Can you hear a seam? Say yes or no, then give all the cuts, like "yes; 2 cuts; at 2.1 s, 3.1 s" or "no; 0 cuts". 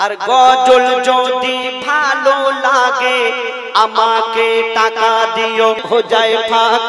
yes; 1 cut; at 5.8 s